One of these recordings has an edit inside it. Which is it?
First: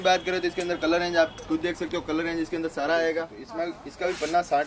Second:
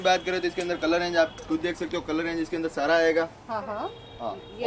first; 1 cut; at 3.4 s

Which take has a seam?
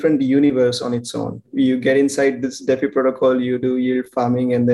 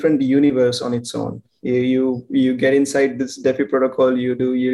first; 1 cut; at 1.5 s

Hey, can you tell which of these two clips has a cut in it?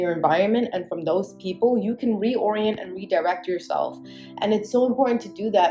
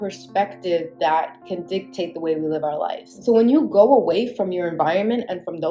second; 1 cut; at 3.1 s

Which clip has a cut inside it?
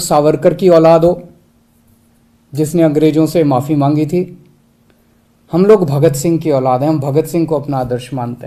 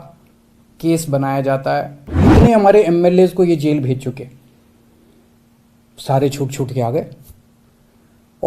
second; 1 cut; at 2.2 s

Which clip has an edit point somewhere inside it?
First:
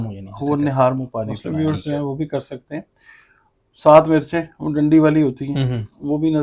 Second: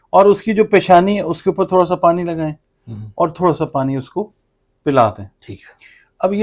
first; 1 cut; at 1.4 s

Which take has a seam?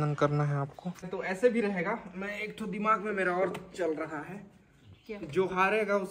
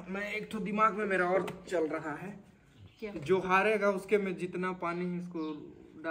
first; 1 cut; at 1.1 s

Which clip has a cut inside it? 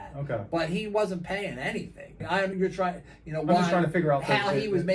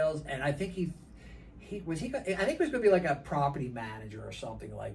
first; 1 cut; at 2.5 s

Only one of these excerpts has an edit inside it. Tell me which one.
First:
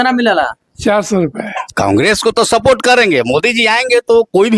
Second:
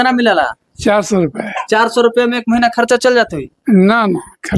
first; 1 cut; at 1.6 s

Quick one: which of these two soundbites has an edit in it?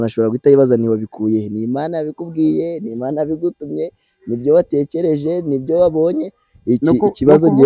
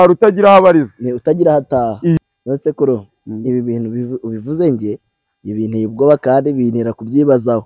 second; 1 cut; at 2.2 s

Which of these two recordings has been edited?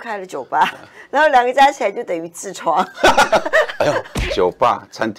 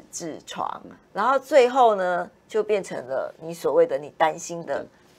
first; 1 cut; at 4.2 s

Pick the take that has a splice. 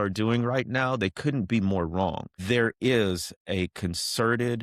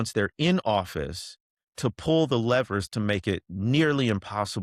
first; 1 cut; at 2.3 s

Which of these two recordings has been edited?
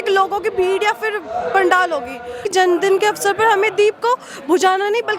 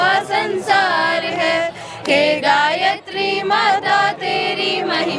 first; 1 cut; at 2.4 s

